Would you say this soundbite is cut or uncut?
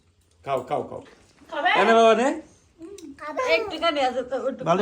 cut